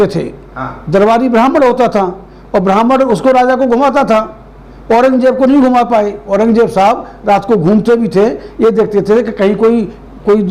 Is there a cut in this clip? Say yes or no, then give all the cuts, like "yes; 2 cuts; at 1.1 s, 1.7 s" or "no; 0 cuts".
no; 0 cuts